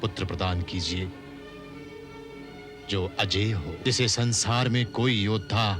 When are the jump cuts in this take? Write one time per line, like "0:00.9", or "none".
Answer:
0:03.8